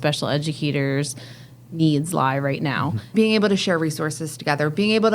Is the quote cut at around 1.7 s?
no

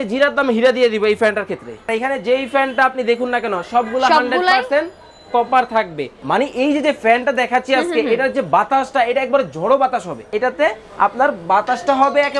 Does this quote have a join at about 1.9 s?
yes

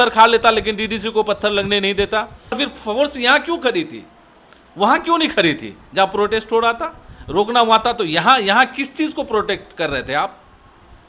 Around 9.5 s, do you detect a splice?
no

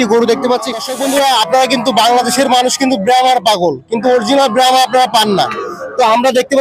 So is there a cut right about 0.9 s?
yes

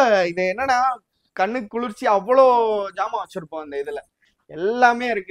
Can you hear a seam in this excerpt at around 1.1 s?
no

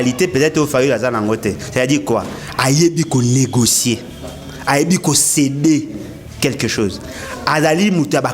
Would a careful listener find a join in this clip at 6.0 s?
no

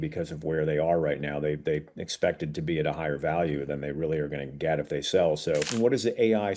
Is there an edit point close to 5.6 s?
yes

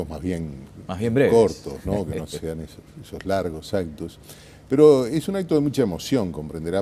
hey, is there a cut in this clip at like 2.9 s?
no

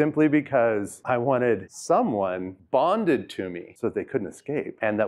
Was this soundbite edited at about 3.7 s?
no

